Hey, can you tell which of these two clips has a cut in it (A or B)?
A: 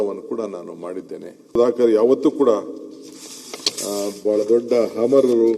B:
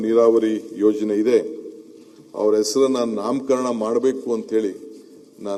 A